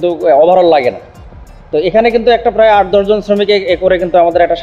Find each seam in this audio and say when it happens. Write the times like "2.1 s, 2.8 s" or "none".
none